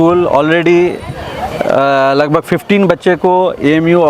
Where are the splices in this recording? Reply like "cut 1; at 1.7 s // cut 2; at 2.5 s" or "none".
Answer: none